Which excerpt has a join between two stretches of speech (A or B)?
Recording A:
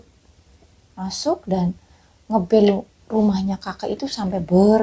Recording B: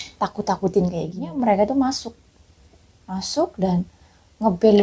B